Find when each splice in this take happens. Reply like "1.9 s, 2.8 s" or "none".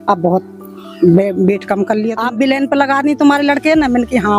2.1 s